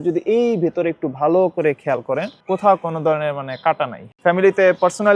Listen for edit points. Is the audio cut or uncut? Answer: cut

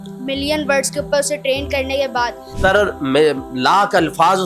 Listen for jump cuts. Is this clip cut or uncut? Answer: cut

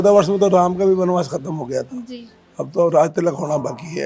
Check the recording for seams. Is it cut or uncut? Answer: uncut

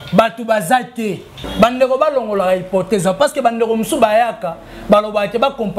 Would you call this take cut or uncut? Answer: cut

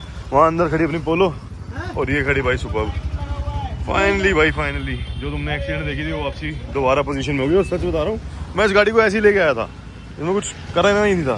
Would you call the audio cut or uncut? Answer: uncut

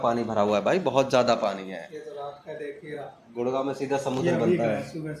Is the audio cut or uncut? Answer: uncut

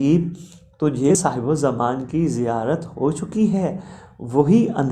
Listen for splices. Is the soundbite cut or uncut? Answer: cut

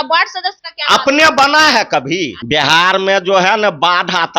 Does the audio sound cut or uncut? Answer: cut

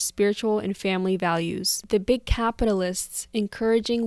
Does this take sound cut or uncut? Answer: cut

